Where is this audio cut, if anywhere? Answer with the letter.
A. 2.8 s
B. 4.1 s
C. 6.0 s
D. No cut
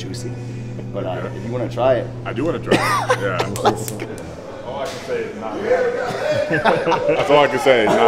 B